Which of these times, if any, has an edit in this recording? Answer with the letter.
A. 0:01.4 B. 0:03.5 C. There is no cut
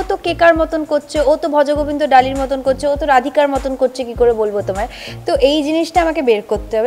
C